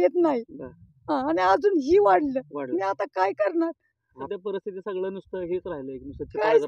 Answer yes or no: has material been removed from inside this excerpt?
yes